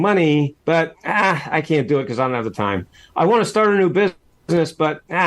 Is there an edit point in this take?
yes; 1 cut; at 4.3 s

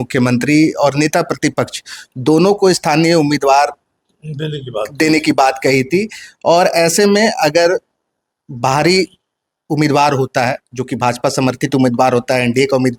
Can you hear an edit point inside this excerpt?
no; 0 cuts

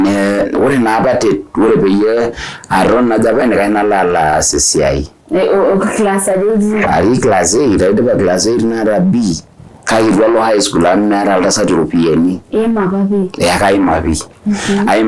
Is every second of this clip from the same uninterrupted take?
yes; 0 cuts

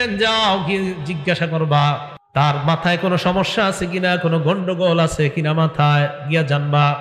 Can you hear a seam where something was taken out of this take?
yes; 1 cut; at 2.1 s

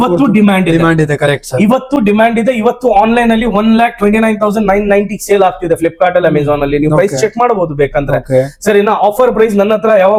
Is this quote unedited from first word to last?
yes; 0 cuts

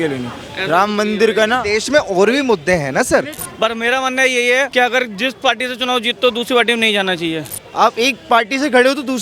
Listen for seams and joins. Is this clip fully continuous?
no; 3 cuts; at 3.4 s, 4.7 s, 7.6 s

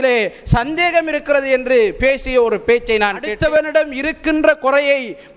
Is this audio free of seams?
no; 1 cut; at 3.4 s

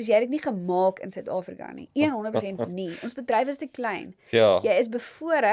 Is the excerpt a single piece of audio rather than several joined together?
yes; 0 cuts

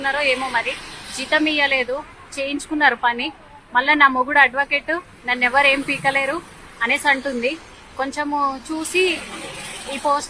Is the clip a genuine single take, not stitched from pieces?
yes; 0 cuts

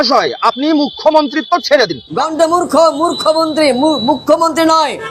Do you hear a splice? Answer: no; 0 cuts

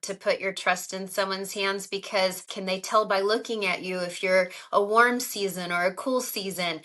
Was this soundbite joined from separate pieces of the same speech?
yes; 1 cut; at 2.5 s

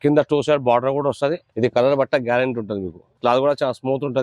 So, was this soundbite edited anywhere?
yes; 2 cuts; at 1.5 s, 3.1 s

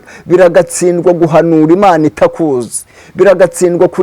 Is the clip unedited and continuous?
yes; 0 cuts

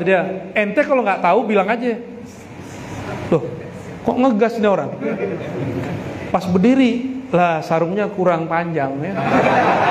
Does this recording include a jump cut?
no; 0 cuts

